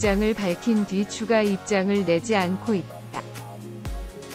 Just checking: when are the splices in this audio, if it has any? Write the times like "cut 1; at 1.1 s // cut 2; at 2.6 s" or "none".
cut 1; at 2.8 s